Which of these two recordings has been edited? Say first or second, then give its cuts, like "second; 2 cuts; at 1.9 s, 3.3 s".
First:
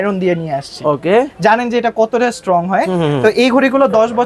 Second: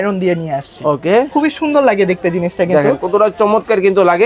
second; 1 cut; at 1.3 s